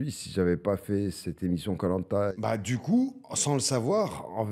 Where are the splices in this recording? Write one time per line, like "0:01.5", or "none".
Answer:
0:02.3